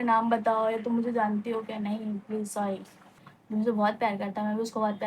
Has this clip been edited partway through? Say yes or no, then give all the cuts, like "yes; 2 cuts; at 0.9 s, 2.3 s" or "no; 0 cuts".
yes; 1 cut; at 3.1 s